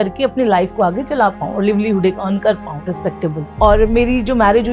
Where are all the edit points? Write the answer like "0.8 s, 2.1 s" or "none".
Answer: 3.4 s